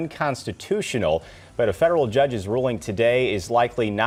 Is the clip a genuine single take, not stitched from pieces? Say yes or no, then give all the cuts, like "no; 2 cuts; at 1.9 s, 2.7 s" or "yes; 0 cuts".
yes; 0 cuts